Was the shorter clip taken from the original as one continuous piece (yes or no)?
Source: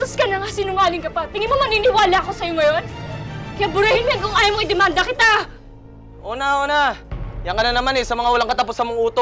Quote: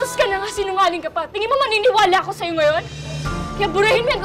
yes